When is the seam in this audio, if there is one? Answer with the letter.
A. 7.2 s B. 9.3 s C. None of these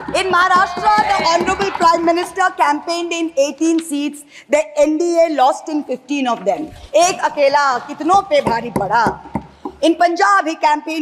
C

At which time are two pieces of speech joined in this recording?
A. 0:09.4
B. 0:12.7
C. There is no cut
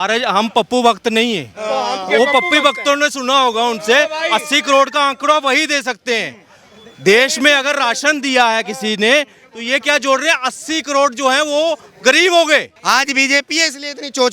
B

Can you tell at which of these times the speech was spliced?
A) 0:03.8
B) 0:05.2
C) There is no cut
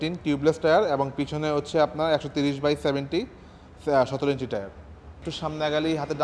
B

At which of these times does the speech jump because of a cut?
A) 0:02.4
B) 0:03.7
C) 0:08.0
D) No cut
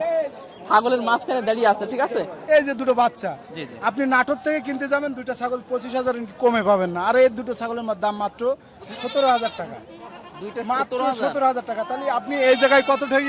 A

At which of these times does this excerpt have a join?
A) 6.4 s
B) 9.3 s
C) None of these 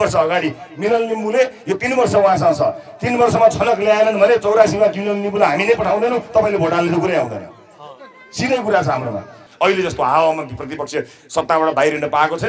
B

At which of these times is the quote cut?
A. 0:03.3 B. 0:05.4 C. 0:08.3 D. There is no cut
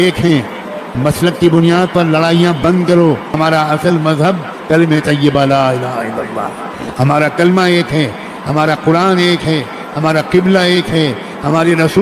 A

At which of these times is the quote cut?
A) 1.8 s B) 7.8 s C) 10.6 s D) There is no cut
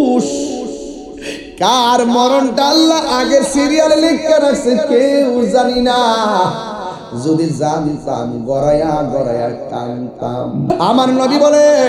C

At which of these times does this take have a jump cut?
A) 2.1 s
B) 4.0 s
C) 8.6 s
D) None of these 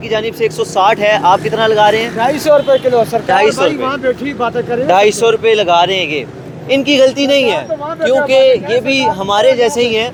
D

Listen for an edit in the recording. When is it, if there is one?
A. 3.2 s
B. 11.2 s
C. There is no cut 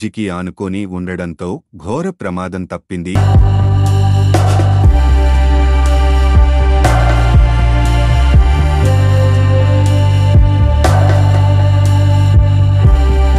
A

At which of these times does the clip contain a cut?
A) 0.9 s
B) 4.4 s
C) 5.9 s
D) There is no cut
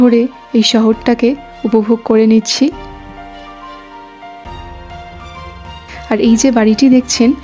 B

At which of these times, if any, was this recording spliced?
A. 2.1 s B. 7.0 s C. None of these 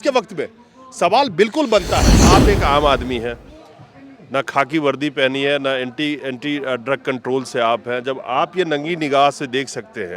A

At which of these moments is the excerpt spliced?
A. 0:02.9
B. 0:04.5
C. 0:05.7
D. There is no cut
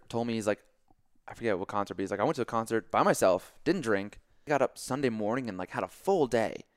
B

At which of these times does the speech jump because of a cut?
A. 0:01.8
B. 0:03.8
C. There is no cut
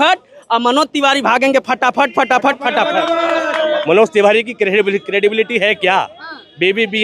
B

